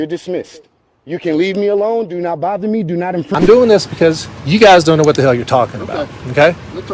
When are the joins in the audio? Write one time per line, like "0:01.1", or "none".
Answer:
0:03.3